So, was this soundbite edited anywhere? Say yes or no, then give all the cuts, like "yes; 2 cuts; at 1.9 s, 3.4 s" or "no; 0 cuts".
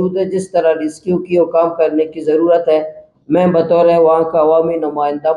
no; 0 cuts